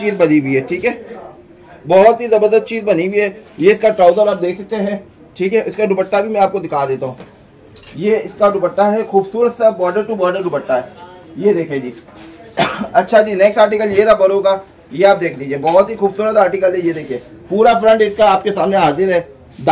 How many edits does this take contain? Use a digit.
0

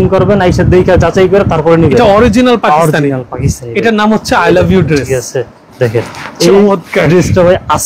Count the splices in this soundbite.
0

